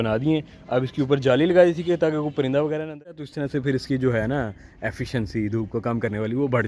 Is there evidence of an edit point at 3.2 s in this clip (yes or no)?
yes